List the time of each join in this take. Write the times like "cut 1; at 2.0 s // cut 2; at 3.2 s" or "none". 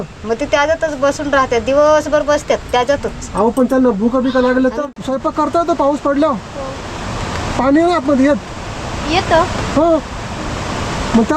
cut 1; at 4.8 s